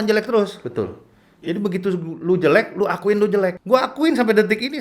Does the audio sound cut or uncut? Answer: cut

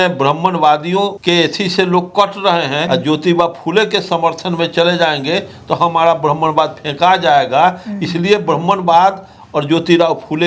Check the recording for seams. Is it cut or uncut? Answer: cut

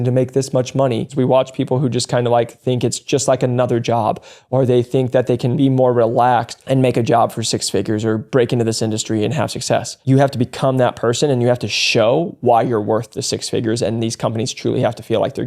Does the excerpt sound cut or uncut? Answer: cut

